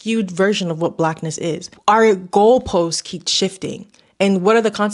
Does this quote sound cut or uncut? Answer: cut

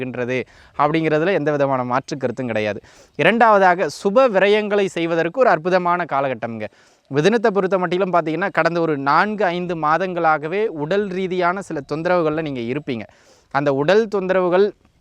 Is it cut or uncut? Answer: uncut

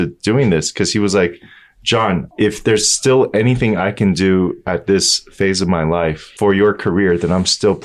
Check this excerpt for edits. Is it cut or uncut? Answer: cut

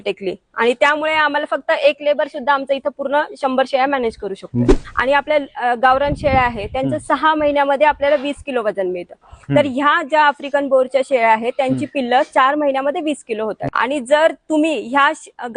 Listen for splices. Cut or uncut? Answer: cut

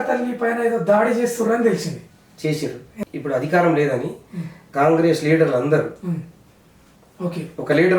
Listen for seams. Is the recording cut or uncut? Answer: cut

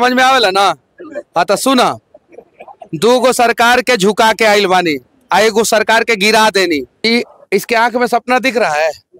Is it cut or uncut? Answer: cut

